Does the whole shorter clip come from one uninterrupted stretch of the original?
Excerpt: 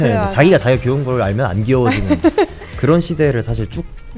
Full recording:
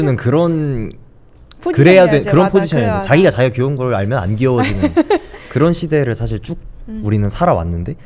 yes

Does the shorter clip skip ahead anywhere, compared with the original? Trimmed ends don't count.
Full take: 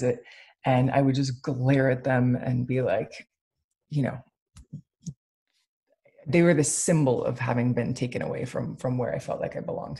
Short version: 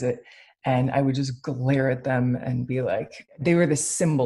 yes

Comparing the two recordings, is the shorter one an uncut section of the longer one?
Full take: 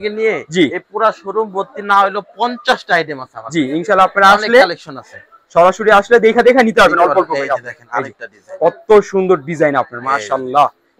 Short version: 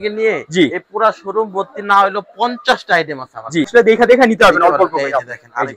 no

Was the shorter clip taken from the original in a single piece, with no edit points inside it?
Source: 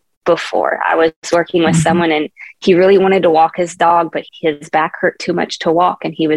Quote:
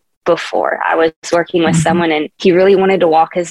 no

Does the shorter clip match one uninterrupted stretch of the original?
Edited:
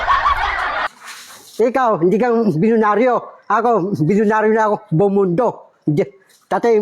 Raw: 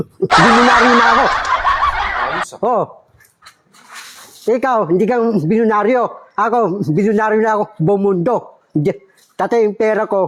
no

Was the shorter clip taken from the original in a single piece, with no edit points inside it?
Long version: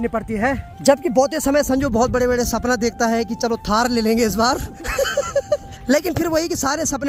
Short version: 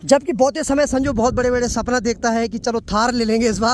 yes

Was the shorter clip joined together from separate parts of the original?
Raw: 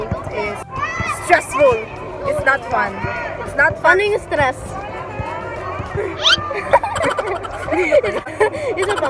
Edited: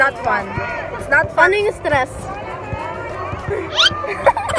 no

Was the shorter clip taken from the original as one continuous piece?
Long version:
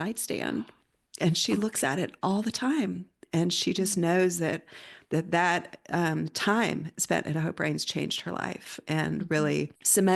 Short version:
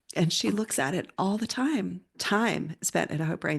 no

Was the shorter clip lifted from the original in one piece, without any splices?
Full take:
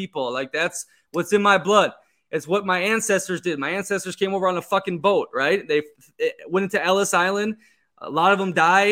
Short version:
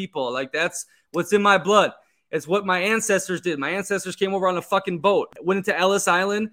no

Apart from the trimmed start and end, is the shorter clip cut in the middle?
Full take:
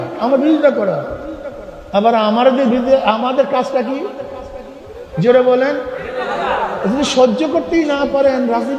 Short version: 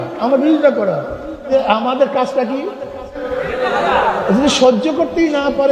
yes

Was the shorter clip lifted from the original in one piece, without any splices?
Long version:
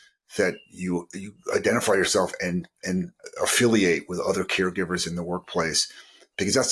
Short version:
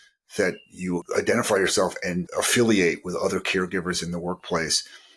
no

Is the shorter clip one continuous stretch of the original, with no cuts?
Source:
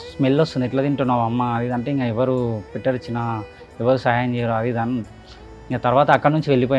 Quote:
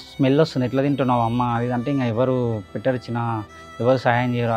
yes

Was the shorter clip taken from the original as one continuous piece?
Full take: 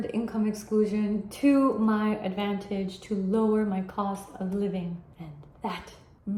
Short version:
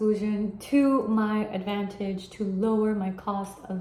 yes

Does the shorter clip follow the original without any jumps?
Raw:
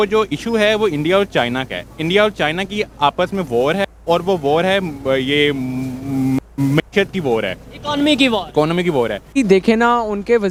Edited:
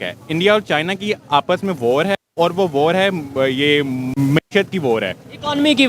no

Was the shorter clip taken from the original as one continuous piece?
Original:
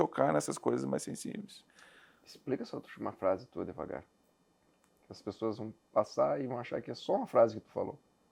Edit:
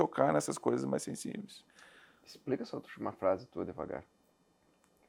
yes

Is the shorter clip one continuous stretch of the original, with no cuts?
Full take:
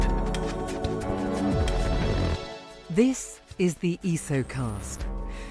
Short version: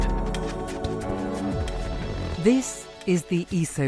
no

